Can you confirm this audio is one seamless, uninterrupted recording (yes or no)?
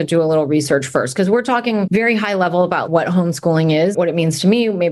no